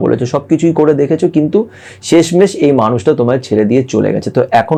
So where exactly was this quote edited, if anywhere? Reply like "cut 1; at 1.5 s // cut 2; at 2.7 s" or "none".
none